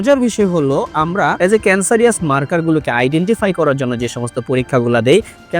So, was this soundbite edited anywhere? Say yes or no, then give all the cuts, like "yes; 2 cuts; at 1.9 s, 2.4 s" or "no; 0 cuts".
yes; 1 cut; at 1.4 s